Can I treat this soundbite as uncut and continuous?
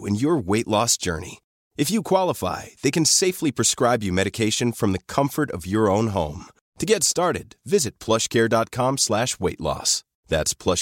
yes; 0 cuts

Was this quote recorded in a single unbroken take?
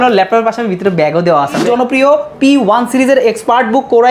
no; 1 cut; at 1.7 s

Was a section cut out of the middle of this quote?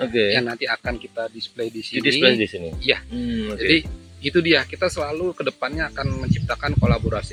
no; 0 cuts

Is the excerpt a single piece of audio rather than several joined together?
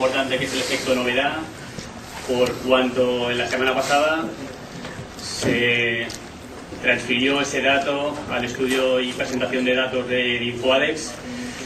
yes; 0 cuts

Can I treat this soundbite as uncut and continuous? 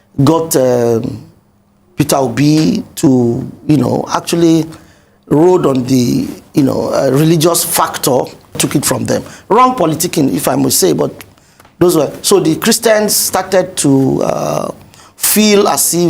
no; 1 cut; at 8.6 s

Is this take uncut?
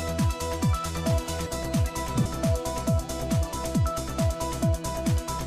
yes; 0 cuts

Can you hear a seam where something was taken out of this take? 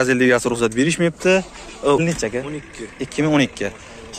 yes; 1 cut; at 2.0 s

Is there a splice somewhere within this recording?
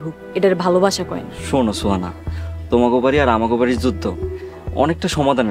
yes; 1 cut; at 1.3 s

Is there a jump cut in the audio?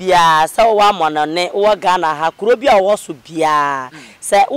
no; 0 cuts

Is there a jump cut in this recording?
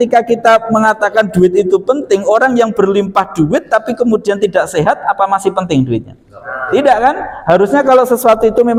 no; 0 cuts

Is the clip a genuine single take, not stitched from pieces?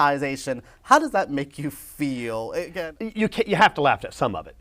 no; 1 cut; at 2.7 s

